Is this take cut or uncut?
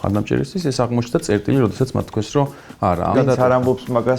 cut